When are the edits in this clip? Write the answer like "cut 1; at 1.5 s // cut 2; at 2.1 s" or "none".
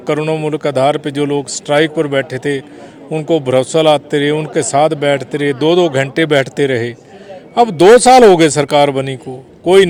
none